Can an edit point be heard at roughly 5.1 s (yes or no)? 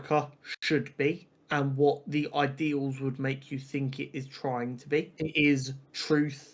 yes